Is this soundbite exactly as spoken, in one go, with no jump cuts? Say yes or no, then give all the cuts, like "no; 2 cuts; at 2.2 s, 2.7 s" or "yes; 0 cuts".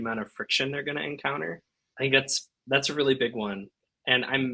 yes; 0 cuts